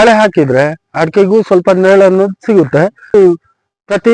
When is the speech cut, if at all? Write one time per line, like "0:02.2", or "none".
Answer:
0:03.1

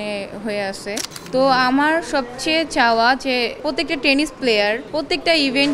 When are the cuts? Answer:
0:01.1
0:03.6
0:04.8

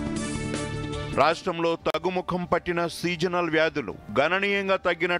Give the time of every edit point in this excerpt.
0:00.9

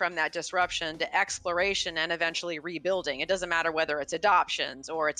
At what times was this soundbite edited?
none

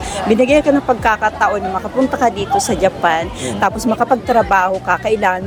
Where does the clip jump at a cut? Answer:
none

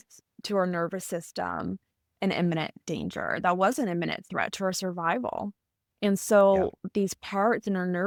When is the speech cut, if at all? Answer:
none

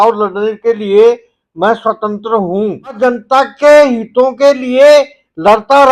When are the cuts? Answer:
0:03.0

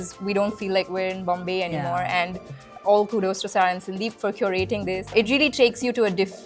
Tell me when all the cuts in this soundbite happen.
0:02.6
0:05.1

